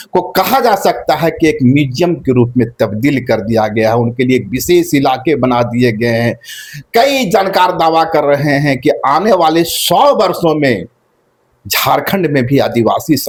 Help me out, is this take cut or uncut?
uncut